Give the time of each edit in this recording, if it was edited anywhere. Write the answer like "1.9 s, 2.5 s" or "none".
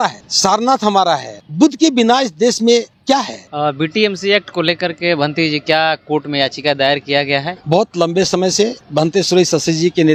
none